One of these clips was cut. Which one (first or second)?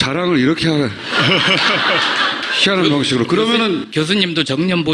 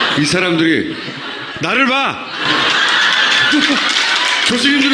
second